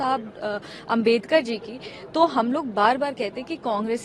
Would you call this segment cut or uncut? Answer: uncut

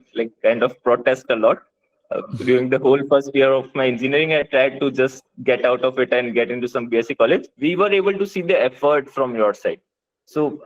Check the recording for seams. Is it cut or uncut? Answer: cut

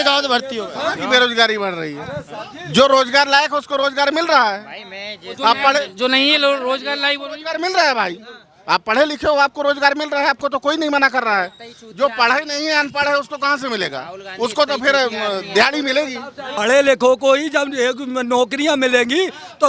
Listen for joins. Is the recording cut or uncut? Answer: cut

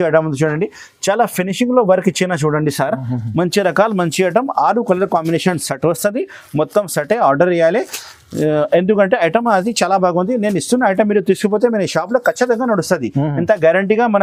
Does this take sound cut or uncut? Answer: uncut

